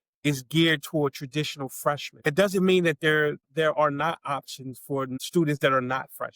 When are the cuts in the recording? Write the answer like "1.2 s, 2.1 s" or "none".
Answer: 2.1 s, 3.5 s, 5.1 s